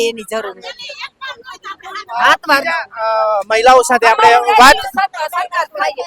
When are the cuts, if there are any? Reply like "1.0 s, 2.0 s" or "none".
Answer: none